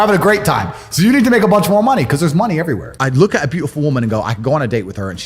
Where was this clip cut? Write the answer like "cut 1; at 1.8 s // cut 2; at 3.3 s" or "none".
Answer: cut 1; at 2.9 s